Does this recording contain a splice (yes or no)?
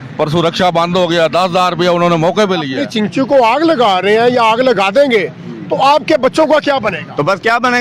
yes